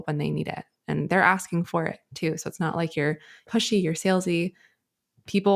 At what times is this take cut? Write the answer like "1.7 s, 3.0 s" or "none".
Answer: 3.3 s